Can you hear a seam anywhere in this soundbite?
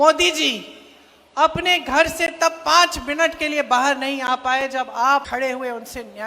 yes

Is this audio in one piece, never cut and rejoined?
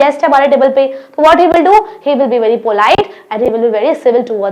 yes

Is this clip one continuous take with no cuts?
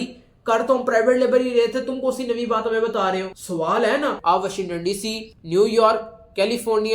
no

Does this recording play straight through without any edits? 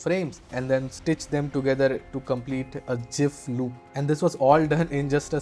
yes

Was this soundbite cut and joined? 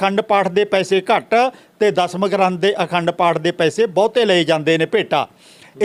no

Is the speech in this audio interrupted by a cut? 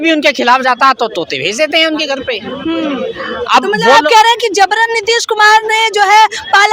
no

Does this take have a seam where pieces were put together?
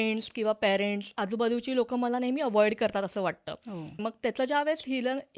yes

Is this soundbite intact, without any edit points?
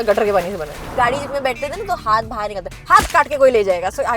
no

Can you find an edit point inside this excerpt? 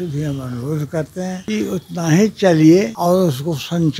yes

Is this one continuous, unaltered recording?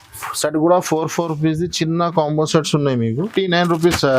no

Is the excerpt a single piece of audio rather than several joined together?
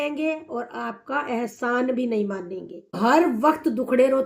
no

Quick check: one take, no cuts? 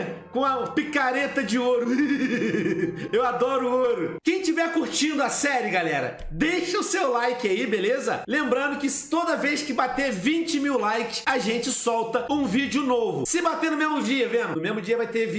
no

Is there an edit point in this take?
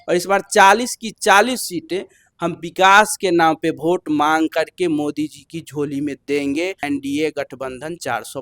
yes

